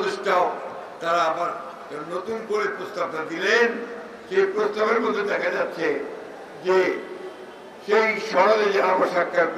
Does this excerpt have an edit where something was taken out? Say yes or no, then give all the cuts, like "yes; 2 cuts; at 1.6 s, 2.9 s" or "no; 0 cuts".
no; 0 cuts